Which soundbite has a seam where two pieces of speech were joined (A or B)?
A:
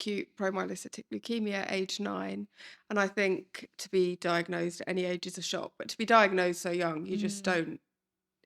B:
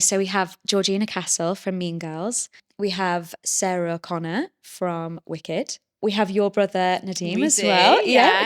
B